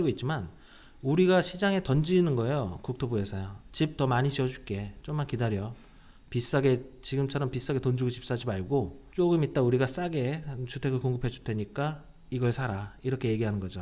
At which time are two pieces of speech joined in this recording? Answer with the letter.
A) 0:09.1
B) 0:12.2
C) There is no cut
C